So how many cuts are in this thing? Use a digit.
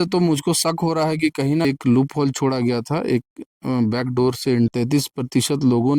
2